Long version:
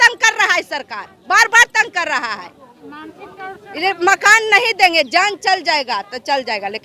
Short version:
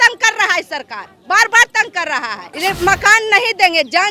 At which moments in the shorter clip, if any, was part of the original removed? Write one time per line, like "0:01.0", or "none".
0:02.5